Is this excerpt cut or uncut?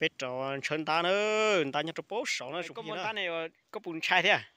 cut